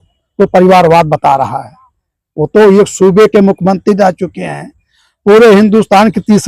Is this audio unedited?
yes; 0 cuts

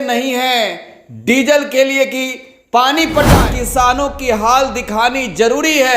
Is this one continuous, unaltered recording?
no; 1 cut; at 3.4 s

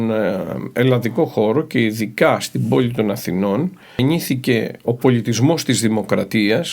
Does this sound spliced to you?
yes; 1 cut; at 4.0 s

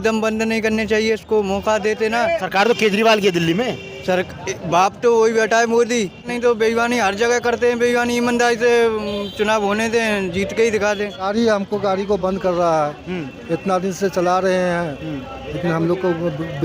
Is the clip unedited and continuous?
no; 3 cuts; at 2.4 s, 6.3 s, 11.2 s

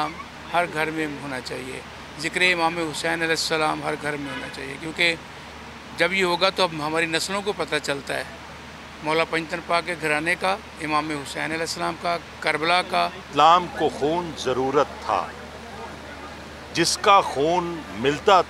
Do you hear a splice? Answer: yes; 1 cut; at 13.3 s

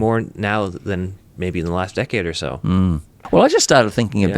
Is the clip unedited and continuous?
no; 1 cut; at 3.1 s

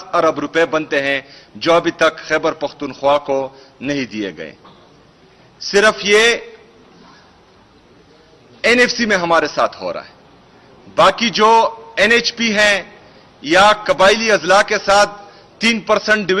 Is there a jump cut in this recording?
no; 0 cuts

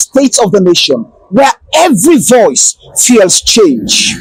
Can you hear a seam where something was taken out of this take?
no; 0 cuts

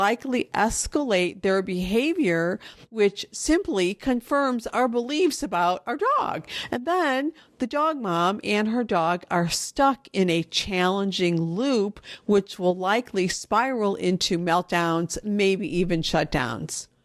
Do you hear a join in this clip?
no; 0 cuts

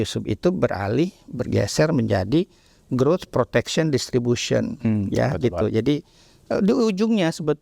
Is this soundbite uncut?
yes; 0 cuts

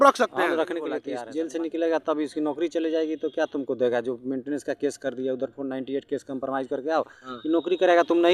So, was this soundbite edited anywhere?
yes; 1 cut; at 1.1 s

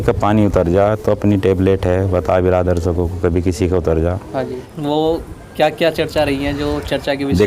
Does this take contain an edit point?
yes; 1 cut; at 4.6 s

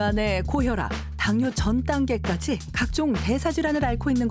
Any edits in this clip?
yes; 1 cut; at 2.7 s

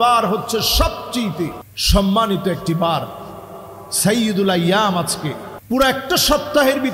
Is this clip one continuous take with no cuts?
no; 2 cuts; at 1.7 s, 5.5 s

